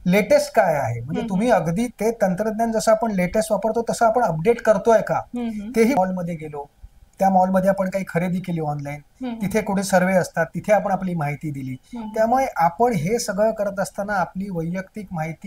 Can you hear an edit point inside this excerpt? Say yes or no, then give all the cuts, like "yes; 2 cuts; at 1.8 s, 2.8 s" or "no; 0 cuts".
yes; 1 cut; at 6.0 s